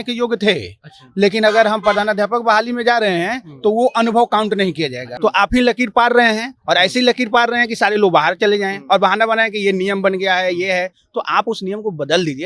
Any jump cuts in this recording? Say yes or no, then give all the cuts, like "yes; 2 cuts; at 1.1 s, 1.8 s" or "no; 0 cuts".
yes; 1 cut; at 5.0 s